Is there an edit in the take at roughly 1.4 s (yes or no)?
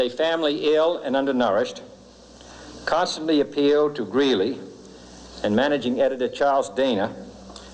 no